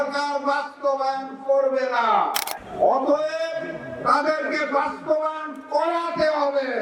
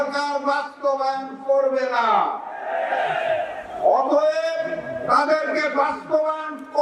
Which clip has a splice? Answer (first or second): first